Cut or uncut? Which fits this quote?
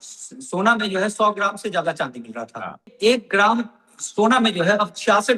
cut